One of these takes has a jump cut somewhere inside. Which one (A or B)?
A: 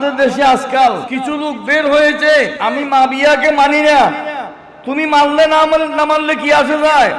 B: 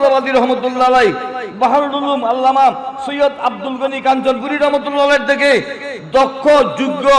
A